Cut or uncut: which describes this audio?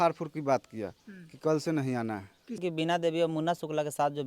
cut